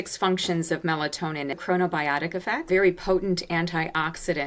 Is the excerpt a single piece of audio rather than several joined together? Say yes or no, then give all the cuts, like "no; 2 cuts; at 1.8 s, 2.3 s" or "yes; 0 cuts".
no; 2 cuts; at 1.6 s, 2.7 s